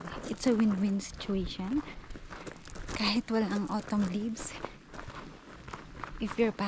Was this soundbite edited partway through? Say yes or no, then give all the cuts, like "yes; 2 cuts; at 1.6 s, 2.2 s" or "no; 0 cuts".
no; 0 cuts